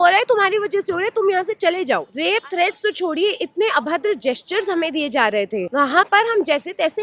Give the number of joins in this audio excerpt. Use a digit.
2